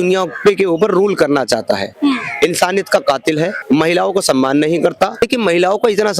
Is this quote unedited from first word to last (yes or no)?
no